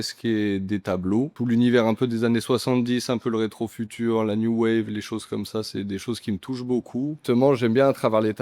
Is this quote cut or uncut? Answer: cut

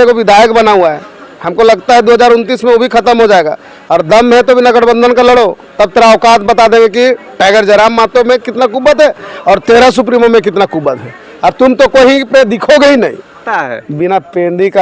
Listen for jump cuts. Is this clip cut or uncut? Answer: cut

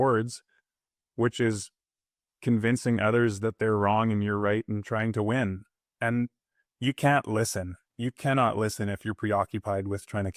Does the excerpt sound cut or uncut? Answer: uncut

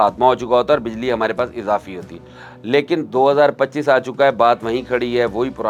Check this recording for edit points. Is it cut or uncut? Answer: uncut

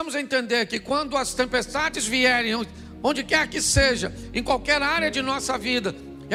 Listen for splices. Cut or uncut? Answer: uncut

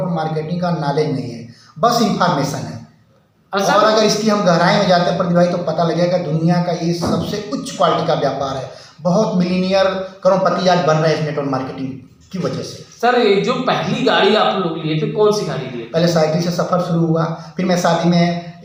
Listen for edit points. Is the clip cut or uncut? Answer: uncut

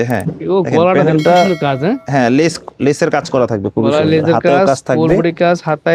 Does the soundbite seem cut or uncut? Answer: uncut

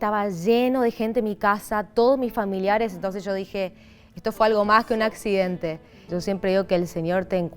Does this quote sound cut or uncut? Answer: cut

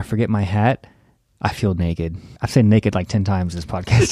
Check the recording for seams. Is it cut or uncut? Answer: cut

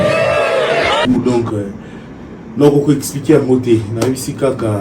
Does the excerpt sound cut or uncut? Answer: cut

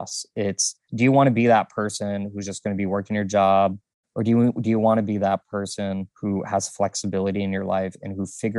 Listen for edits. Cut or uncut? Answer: cut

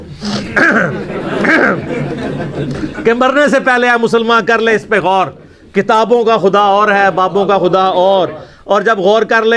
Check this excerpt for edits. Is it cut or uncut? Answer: uncut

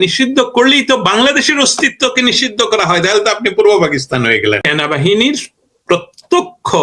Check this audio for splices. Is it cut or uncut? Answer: cut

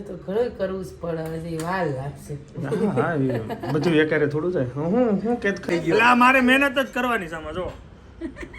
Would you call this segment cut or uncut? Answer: cut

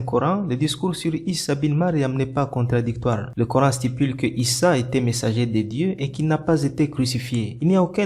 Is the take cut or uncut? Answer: uncut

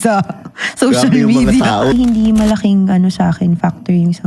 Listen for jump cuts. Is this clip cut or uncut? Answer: cut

